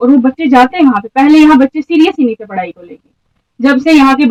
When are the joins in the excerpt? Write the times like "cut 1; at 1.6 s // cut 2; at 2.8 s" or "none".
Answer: none